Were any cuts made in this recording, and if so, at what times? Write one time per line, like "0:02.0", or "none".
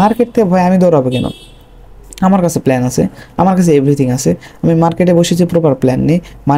none